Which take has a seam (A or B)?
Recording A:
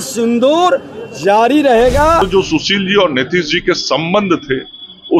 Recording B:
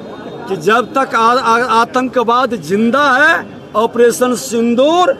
A